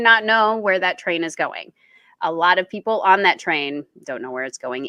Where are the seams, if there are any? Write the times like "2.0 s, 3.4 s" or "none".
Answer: none